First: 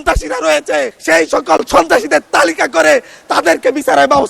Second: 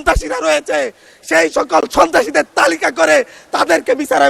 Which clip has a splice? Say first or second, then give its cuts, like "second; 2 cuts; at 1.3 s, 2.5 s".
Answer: first; 1 cut; at 1.0 s